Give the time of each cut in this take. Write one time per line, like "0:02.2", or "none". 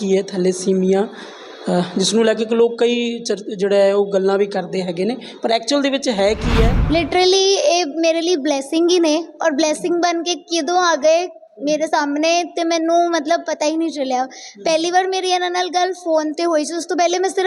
0:06.8